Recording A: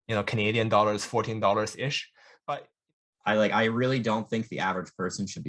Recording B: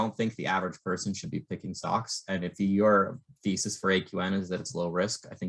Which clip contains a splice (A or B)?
A